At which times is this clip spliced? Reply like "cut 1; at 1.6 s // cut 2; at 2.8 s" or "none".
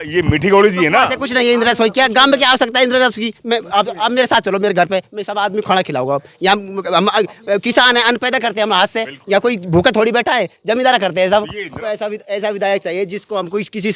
cut 1; at 11.6 s